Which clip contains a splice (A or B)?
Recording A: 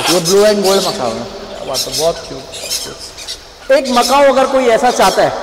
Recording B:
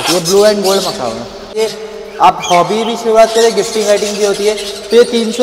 B